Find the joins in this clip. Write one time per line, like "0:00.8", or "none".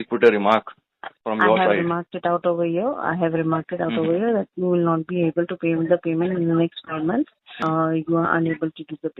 0:07.6